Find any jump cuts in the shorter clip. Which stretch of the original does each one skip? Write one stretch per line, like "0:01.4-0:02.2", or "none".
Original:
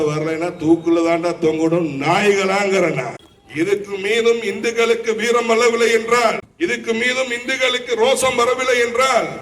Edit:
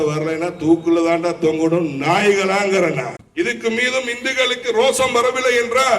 0:03.2-0:06.5